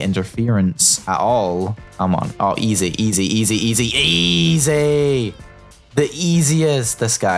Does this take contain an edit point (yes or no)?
yes